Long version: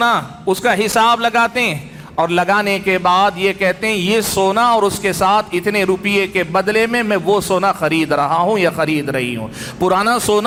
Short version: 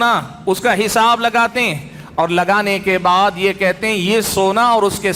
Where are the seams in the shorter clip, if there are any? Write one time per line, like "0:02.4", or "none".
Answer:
none